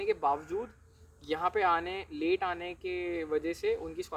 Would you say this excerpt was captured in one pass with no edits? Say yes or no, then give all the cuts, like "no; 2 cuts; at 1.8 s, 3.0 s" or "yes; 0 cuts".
yes; 0 cuts